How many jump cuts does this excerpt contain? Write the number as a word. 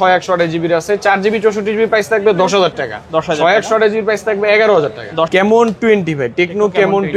one